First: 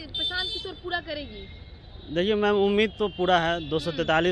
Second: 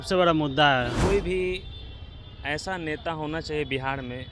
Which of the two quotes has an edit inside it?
second; 1 cut; at 1.0 s

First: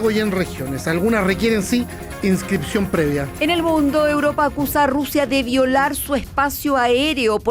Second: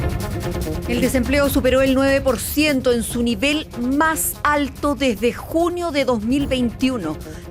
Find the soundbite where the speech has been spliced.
second; 1 cut; at 1.0 s

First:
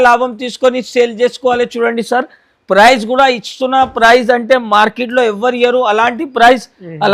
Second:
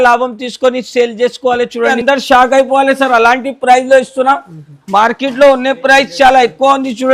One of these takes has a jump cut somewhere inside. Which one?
second; 1 cut; at 2.0 s

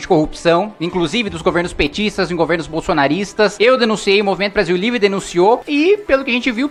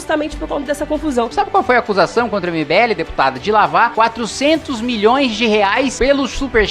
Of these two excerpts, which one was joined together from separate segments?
second; 3 cuts; at 1.3 s, 3.9 s, 5.9 s

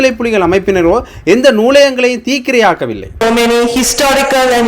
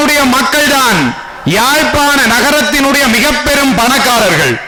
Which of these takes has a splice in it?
first; 1 cut; at 3.2 s

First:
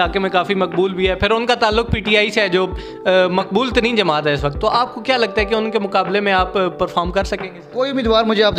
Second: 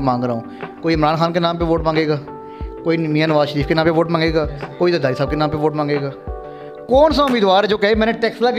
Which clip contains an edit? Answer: first; 1 cut; at 7.6 s

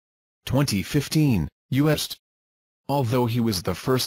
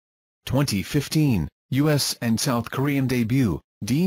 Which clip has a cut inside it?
second; 1 cut; at 2.0 s

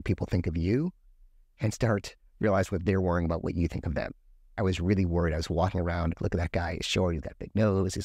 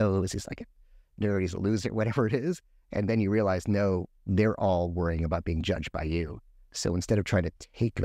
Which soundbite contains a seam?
first; 2 cuts; at 4.5 s, 6.2 s

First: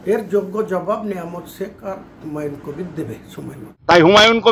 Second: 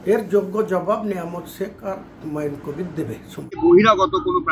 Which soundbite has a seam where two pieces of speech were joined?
first; 1 cut; at 3.6 s

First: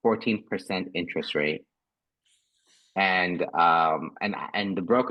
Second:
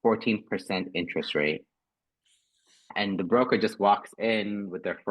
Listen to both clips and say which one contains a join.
second; 1 cut; at 2.9 s

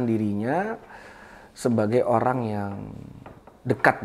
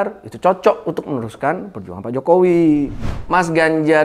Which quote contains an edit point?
second; 1 cut; at 3.1 s

